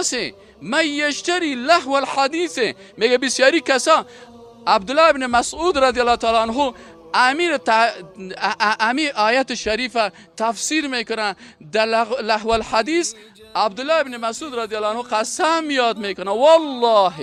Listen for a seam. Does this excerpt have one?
no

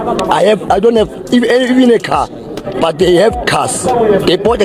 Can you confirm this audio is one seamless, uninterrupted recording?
yes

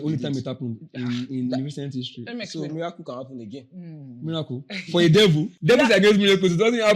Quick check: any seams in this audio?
yes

